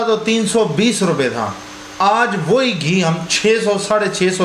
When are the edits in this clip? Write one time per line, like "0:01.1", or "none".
none